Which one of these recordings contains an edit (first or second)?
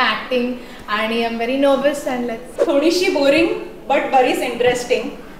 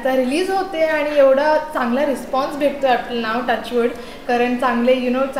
first